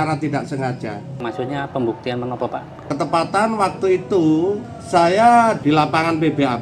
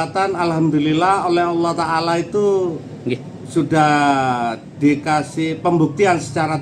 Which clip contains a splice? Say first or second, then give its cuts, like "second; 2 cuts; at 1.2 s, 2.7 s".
first; 4 cuts; at 1.2 s, 2.8 s, 4.7 s, 5.6 s